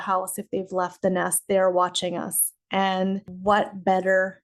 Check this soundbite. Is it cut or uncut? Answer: cut